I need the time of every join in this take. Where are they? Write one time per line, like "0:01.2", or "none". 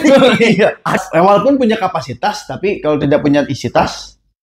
0:01.0